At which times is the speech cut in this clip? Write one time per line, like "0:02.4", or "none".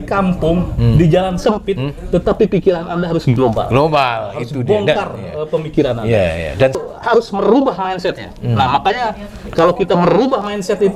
0:06.8